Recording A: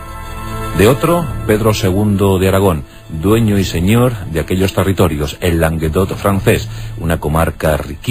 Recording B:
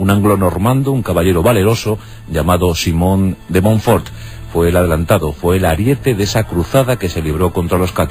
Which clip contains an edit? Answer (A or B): B